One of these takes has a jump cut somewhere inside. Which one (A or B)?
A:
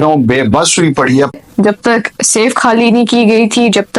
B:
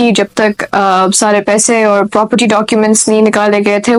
A